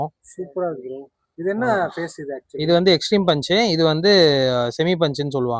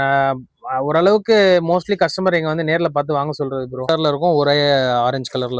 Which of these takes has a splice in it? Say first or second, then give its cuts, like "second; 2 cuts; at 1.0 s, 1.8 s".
second; 1 cut; at 3.9 s